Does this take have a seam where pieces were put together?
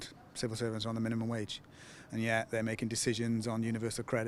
no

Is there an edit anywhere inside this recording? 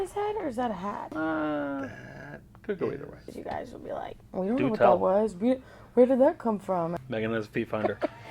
yes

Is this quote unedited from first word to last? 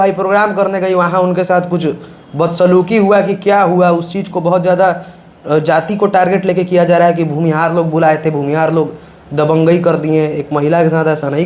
yes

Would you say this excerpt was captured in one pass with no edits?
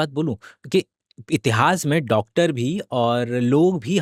yes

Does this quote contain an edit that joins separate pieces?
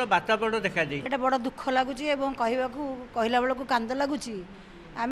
yes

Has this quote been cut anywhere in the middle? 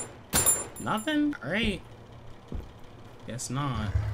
no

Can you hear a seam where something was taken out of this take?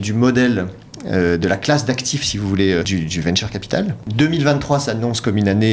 yes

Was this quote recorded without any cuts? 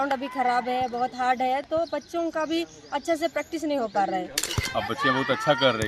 no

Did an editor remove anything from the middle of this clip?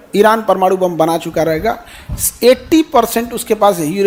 no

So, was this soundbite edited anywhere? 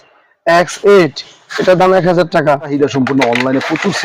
yes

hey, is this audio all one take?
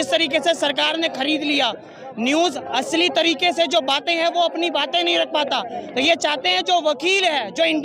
yes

